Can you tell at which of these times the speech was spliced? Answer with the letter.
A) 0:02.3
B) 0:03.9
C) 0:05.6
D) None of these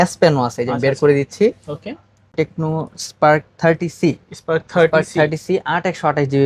A